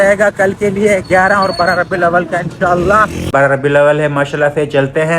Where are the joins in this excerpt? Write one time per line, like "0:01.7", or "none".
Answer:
0:03.3